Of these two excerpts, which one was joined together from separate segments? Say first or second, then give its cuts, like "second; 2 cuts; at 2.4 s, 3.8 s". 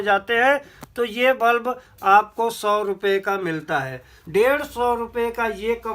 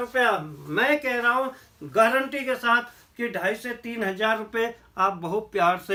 first; 1 cut; at 4.1 s